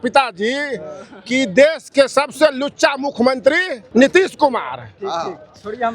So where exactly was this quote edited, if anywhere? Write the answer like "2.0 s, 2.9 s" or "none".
3.8 s